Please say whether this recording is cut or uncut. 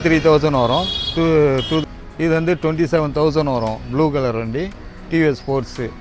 cut